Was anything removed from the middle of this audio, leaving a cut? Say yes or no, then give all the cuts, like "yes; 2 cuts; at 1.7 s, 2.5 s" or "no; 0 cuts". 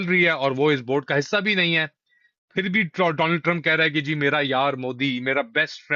no; 0 cuts